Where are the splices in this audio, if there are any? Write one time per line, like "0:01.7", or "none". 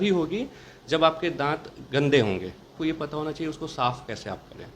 0:02.8